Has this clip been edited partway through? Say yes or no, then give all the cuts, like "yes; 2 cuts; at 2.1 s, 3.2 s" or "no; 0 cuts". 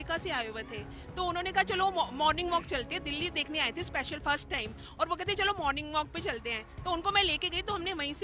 no; 0 cuts